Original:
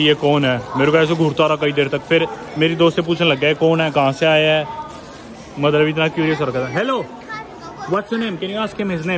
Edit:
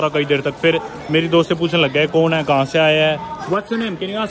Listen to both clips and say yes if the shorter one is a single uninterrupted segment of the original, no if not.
no